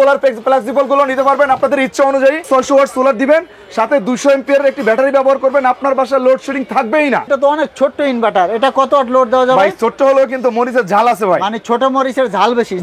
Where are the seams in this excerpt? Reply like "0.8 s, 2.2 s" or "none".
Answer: 2.5 s, 7.3 s